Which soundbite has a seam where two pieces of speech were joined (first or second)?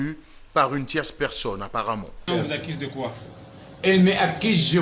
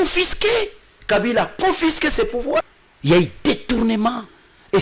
second